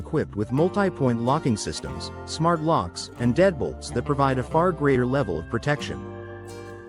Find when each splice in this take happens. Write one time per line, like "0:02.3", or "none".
0:05.9

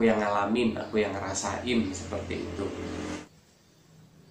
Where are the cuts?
0:03.2

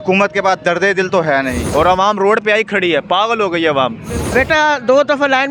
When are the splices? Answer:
0:01.6

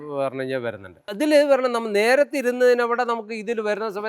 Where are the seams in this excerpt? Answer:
0:01.0

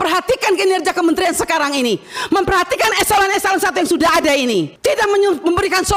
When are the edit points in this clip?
0:04.7

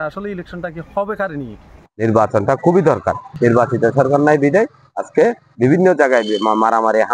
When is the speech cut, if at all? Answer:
0:01.8
0:03.3

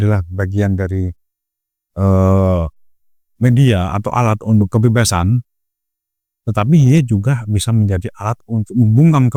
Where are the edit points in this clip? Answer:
none

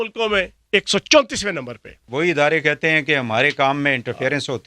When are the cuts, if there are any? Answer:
0:02.0

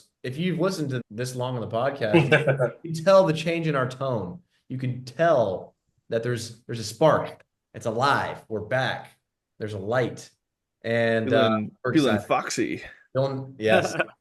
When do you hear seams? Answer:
0:01.0

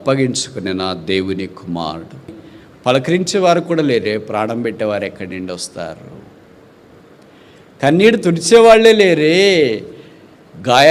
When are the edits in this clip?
0:02.4

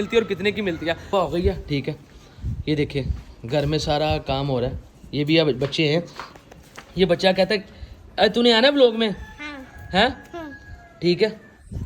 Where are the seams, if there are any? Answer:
0:01.0

